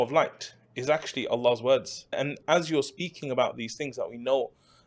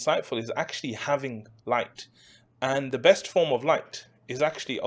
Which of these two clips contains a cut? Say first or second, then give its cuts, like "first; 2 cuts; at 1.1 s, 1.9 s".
first; 1 cut; at 2.4 s